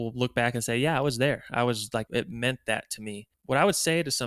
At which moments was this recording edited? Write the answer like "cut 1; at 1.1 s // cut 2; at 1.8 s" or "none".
cut 1; at 2.1 s // cut 2; at 3.3 s